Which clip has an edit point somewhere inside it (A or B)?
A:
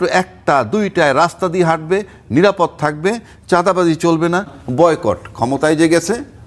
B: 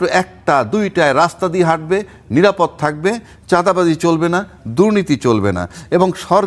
A